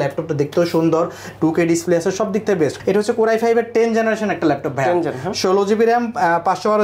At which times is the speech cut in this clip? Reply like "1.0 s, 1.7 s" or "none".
none